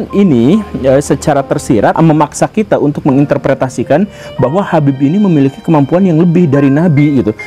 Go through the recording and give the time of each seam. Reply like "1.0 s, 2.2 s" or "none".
1.9 s

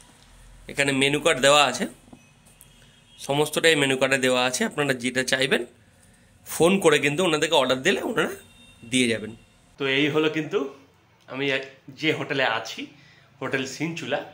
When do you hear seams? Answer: none

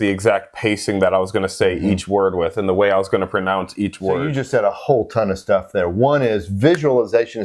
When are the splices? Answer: 4.3 s

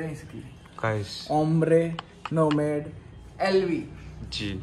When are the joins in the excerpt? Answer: none

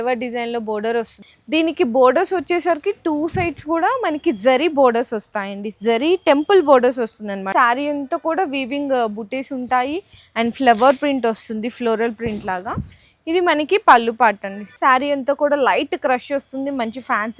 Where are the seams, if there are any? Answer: 1.3 s, 7.5 s, 14.7 s

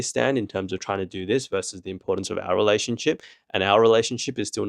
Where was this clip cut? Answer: none

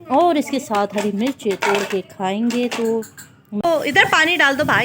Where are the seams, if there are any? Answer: 3.6 s

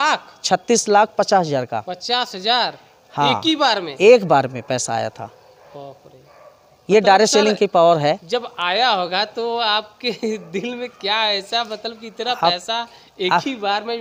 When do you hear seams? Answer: none

